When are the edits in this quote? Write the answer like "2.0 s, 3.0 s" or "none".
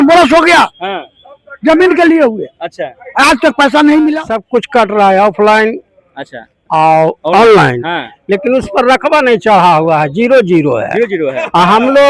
4.3 s